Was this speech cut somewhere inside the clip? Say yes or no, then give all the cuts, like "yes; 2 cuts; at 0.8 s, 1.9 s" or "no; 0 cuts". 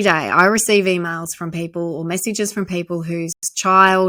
no; 0 cuts